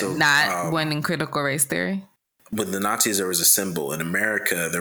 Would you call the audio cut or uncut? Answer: cut